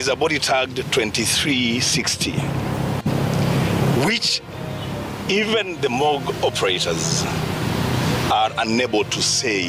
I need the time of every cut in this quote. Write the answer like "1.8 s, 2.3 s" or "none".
none